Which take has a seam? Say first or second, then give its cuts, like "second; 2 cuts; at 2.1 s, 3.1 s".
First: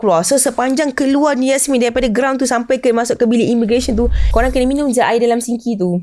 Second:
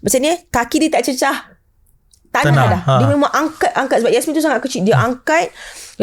first; 1 cut; at 4.2 s